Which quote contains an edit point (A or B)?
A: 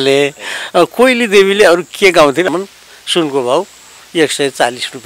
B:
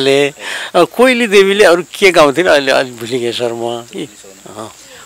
A